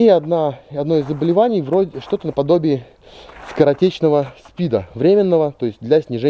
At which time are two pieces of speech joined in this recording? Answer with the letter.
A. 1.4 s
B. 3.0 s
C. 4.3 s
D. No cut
D